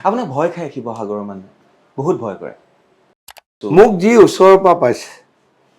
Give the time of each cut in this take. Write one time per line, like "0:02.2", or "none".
0:03.5